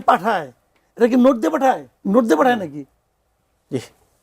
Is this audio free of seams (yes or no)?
no